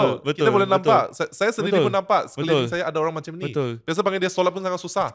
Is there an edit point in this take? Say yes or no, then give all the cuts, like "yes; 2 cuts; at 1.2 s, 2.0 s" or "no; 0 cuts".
no; 0 cuts